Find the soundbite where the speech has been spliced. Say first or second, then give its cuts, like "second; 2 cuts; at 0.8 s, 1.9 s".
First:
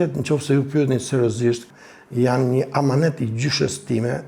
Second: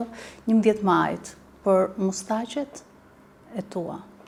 first; 1 cut; at 1.7 s